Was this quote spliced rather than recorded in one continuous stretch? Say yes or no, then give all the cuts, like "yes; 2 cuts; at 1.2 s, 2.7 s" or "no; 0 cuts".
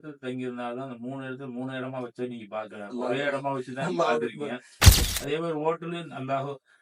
yes; 1 cut; at 4.9 s